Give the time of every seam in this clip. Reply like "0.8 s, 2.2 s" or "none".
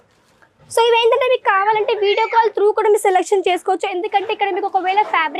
none